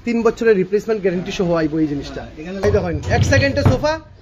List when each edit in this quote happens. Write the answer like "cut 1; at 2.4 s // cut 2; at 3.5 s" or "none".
cut 1; at 2.6 s